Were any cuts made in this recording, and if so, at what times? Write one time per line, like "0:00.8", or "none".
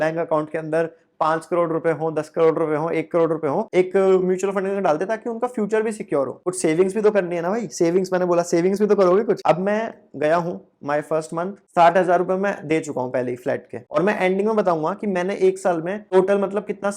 0:03.6
0:09.4
0:13.8